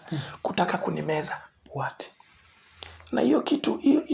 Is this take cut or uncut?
uncut